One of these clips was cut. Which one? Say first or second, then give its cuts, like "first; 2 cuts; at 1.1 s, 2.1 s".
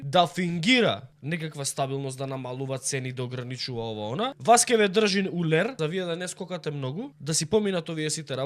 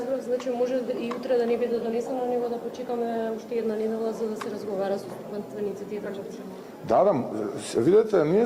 first; 4 cuts; at 1.1 s, 4.4 s, 5.8 s, 7.2 s